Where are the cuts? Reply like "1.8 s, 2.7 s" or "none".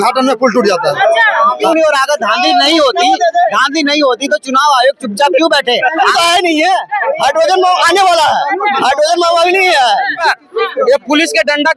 1.6 s, 6.1 s, 10.2 s